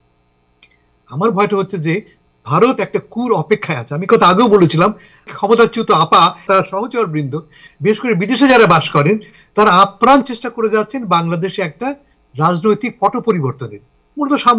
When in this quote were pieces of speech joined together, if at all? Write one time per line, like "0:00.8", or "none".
0:05.3
0:06.4